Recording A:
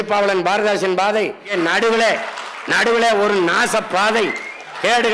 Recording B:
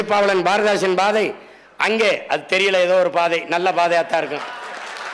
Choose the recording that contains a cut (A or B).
A